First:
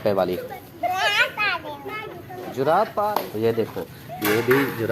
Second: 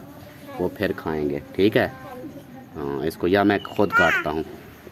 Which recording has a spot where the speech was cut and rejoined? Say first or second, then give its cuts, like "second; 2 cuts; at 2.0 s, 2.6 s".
first; 1 cut; at 3.1 s